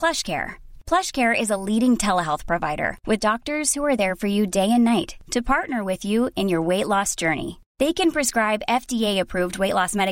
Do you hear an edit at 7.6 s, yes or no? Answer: no